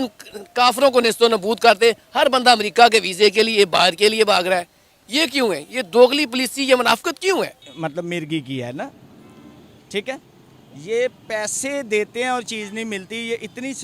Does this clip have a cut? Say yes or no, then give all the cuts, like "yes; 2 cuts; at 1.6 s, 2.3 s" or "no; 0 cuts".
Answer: yes; 1 cut; at 7.7 s